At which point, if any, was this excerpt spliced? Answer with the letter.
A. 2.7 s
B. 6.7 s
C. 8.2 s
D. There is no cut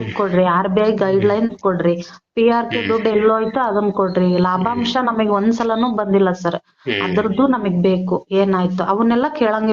D